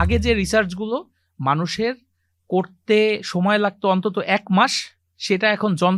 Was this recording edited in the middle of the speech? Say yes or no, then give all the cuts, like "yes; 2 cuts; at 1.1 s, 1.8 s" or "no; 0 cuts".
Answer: no; 0 cuts